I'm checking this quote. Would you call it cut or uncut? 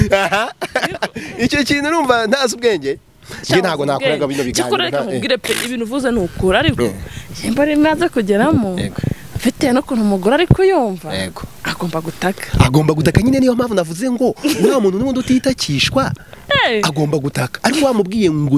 uncut